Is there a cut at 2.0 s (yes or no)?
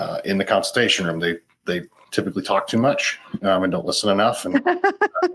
yes